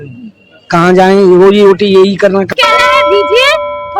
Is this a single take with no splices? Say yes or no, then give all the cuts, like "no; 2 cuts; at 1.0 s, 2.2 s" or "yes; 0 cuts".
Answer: no; 1 cut; at 2.5 s